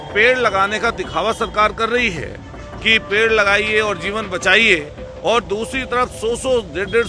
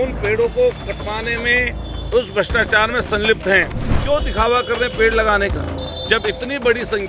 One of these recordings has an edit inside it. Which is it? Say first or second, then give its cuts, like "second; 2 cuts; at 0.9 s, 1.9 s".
second; 1 cut; at 3.9 s